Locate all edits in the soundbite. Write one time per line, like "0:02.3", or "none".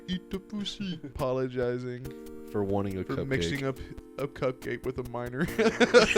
0:01.1